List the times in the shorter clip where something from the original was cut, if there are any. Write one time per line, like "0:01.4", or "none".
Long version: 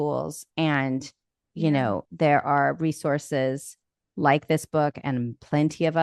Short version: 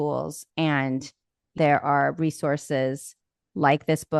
0:01.5